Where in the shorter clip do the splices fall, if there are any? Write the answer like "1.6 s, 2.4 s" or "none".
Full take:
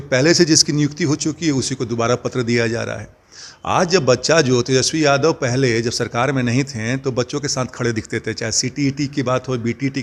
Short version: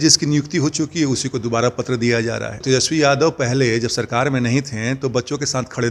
2.6 s